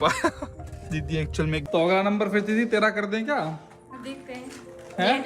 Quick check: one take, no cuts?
no; 1 cut; at 1.7 s

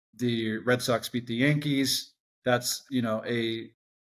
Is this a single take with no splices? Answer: yes; 0 cuts

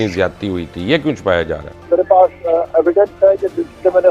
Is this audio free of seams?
no; 1 cut; at 1.9 s

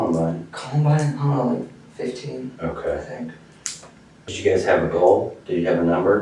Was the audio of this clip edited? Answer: yes; 1 cut; at 4.3 s

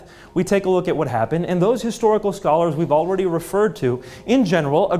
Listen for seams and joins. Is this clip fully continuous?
yes; 0 cuts

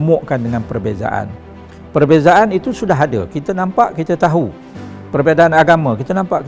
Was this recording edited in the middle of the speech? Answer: no; 0 cuts

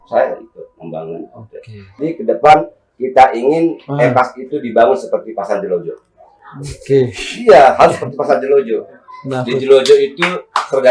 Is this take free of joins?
no; 1 cut; at 2.0 s

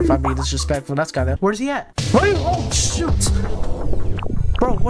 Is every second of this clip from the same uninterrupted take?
no; 1 cut; at 1.4 s

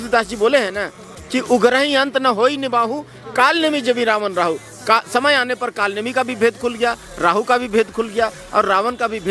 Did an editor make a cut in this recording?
no; 0 cuts

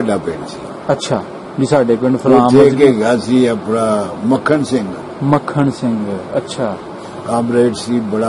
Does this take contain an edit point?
yes; 1 cut; at 1.4 s

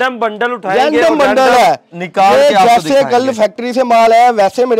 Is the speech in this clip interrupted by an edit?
no; 0 cuts

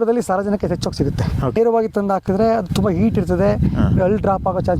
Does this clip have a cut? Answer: yes; 1 cut; at 1.6 s

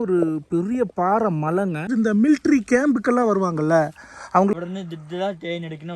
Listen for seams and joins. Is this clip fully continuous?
no; 2 cuts; at 1.9 s, 4.5 s

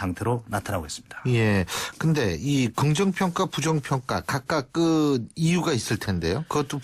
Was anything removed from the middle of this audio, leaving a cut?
yes; 1 cut; at 4.3 s

